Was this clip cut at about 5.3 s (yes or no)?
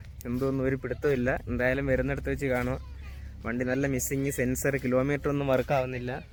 no